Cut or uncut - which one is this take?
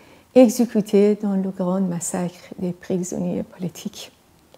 uncut